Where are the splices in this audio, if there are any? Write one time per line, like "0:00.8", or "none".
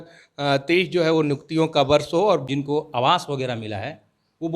0:02.5